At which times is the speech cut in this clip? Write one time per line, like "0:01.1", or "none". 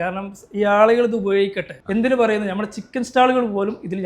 0:01.7